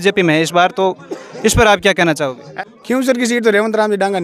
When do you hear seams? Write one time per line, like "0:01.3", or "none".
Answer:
0:02.4